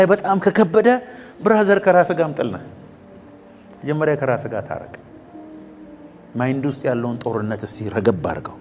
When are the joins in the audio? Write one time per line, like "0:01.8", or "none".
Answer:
none